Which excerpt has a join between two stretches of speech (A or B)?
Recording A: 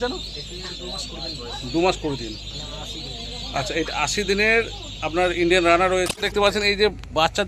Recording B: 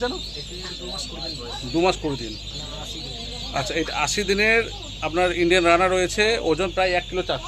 A